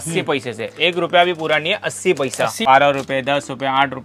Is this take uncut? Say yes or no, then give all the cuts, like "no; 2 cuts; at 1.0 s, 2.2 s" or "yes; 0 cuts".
no; 1 cut; at 2.6 s